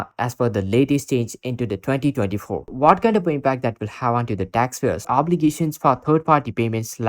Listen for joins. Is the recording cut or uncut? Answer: cut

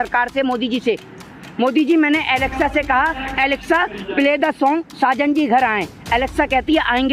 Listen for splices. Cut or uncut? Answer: uncut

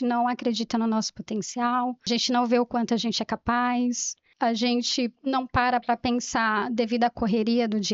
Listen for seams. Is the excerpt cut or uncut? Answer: cut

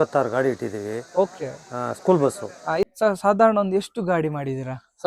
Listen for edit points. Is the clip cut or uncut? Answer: cut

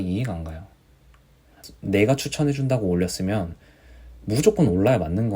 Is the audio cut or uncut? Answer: cut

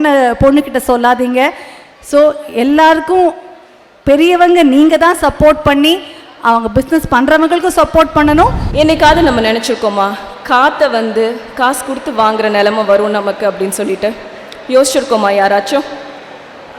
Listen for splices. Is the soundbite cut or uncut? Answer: cut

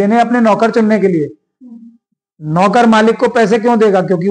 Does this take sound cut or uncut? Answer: uncut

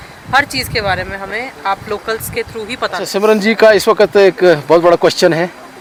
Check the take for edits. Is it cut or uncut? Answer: uncut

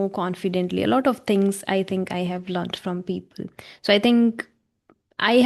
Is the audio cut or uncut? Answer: uncut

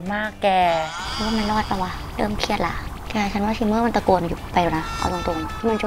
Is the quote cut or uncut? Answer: uncut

